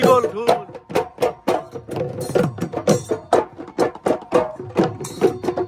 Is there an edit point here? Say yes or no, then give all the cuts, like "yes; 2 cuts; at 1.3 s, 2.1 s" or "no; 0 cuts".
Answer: no; 0 cuts